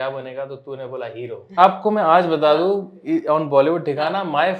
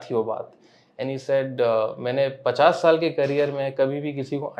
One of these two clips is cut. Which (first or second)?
first